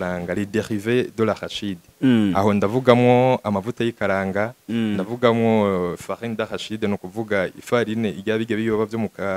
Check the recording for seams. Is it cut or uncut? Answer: uncut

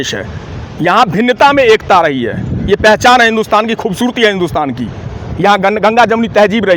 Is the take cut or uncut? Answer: uncut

